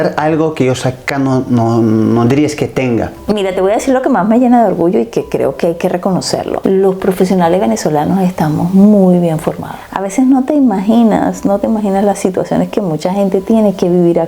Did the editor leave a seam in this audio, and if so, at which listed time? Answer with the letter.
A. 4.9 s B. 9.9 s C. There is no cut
B